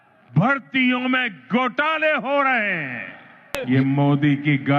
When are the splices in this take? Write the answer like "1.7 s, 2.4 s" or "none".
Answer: 3.6 s